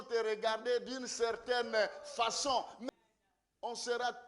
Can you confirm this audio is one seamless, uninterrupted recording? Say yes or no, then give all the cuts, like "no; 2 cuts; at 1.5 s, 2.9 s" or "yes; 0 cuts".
no; 1 cut; at 2.8 s